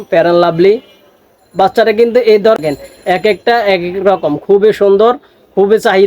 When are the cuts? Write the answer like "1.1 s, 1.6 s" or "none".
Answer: 2.6 s